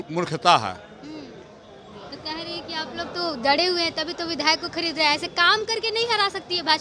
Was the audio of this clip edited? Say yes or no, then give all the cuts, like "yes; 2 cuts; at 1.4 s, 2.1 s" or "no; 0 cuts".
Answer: no; 0 cuts